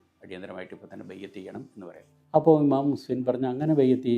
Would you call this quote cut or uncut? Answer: cut